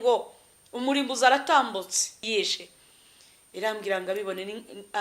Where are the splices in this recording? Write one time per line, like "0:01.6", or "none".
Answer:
0:02.2